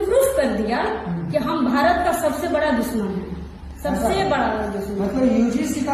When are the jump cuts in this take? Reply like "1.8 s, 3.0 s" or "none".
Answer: none

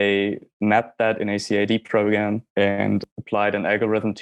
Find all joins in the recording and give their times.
3.0 s

